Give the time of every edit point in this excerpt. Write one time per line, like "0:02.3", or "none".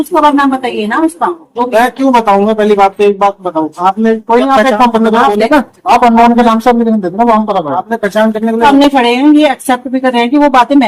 none